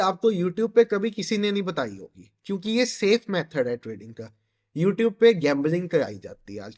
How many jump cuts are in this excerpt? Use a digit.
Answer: 0